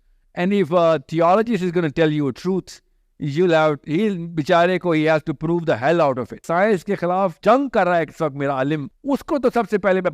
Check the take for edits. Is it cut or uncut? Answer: cut